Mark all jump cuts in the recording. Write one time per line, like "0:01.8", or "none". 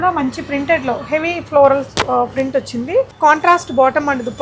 0:03.1